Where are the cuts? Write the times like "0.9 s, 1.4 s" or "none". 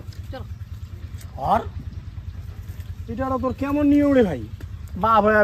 none

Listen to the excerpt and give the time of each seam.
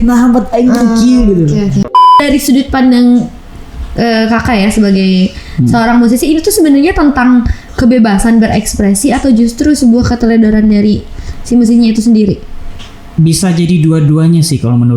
1.8 s

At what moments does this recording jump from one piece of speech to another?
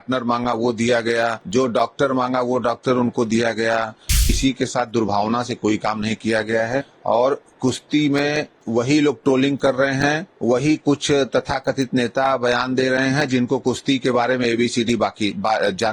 1.4 s, 4.4 s, 6.9 s, 8.5 s, 10.3 s

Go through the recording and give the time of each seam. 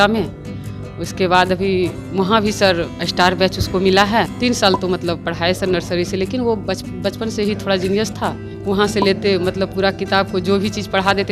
4.3 s, 8.5 s

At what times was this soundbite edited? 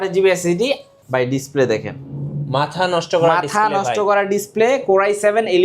1.0 s

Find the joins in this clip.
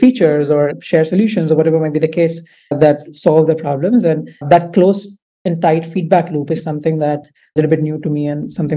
7.5 s

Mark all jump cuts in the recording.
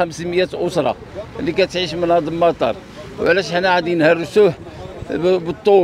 none

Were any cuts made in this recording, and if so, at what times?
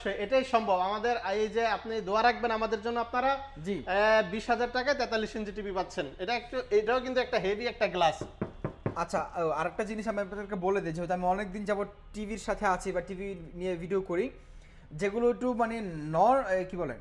none

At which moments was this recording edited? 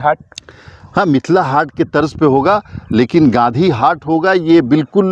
none

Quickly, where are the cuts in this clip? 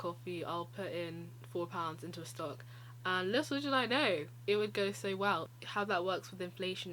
5.5 s

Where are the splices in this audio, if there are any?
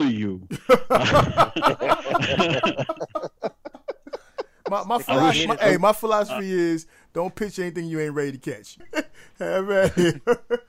8.9 s

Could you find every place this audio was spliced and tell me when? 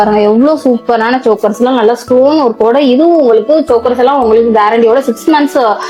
none

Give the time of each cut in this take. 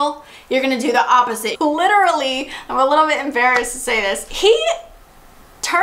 1.4 s, 4.3 s

